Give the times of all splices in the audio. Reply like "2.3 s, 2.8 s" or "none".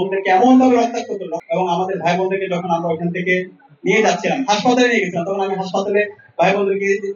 1.4 s